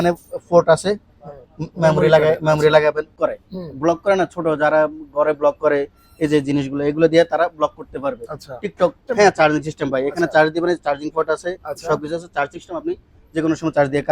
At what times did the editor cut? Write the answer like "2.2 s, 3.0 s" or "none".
3.2 s, 9.0 s